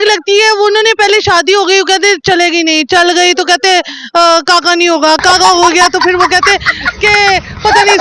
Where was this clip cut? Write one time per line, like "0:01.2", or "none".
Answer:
none